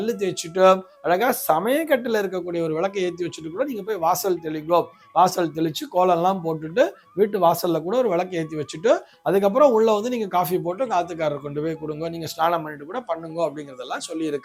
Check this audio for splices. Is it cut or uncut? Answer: uncut